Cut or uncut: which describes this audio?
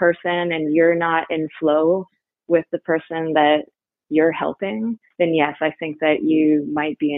uncut